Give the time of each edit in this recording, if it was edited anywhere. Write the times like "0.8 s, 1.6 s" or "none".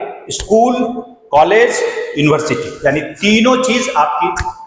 none

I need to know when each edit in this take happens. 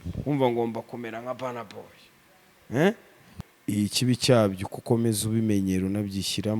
3.4 s

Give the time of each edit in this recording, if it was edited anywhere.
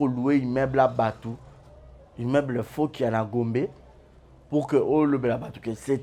none

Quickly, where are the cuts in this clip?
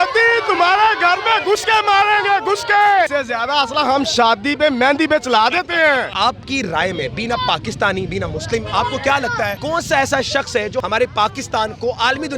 3.1 s, 6.1 s, 9.6 s, 10.8 s

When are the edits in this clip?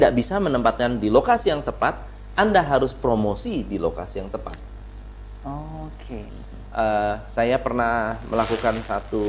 6.3 s

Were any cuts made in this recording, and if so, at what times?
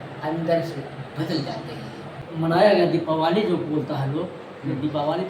2.2 s

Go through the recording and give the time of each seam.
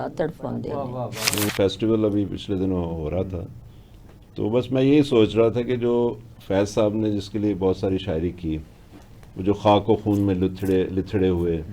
1.5 s

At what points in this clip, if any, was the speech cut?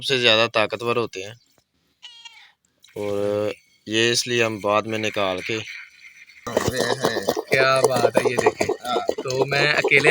6.5 s

